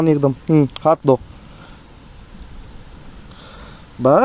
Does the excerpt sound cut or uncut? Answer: uncut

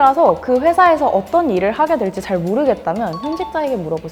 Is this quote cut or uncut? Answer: uncut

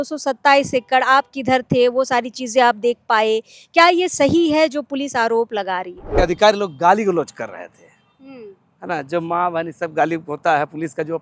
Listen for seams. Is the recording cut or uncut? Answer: cut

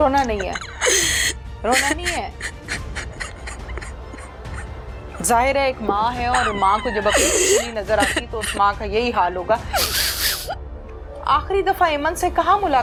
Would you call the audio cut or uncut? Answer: uncut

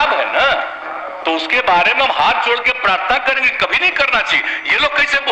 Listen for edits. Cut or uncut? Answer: uncut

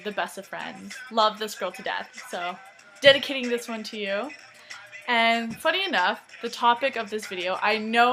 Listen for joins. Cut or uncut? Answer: cut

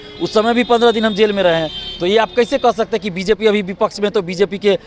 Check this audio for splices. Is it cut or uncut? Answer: uncut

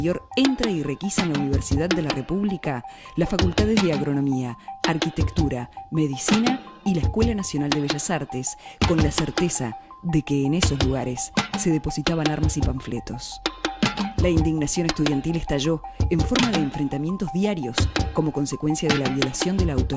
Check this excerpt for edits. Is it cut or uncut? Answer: cut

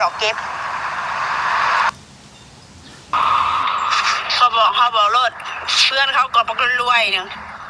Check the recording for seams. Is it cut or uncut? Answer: cut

